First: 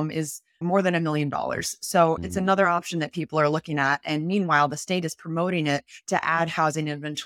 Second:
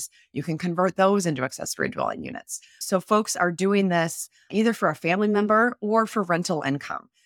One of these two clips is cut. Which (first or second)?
first